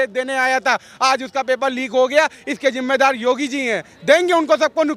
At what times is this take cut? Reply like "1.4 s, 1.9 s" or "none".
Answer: none